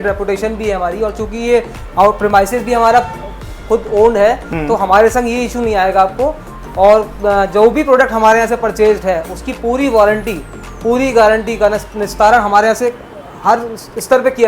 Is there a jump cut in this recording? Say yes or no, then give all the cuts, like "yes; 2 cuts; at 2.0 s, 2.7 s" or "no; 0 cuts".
no; 0 cuts